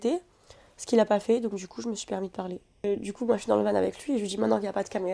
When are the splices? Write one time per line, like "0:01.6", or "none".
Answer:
0:02.9